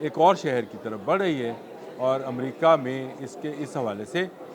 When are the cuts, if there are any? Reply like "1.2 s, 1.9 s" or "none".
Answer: none